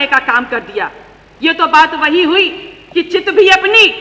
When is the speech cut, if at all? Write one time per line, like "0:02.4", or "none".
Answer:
none